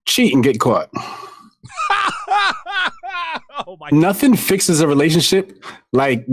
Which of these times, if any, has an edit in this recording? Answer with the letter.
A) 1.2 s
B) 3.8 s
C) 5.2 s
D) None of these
B